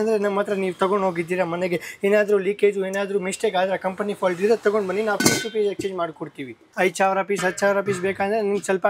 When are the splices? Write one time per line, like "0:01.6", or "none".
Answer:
0:06.6